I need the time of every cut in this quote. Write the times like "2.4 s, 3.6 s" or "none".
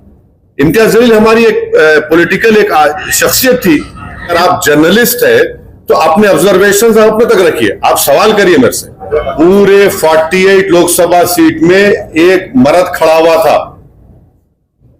4.3 s, 9.0 s